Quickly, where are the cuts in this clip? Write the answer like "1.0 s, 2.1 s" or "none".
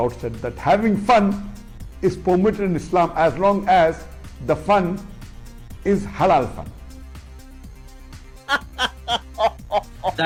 none